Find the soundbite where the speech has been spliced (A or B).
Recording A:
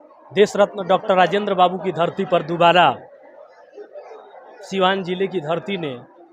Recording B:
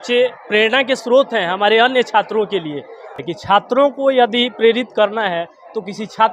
B